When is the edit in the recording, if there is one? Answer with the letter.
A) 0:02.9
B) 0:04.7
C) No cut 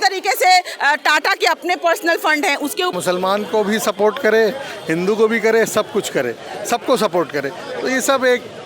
A